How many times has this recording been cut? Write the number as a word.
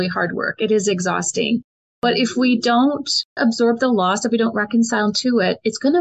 one